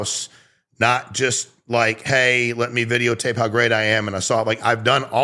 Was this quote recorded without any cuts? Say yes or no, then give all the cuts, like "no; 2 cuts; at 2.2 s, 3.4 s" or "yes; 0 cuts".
yes; 0 cuts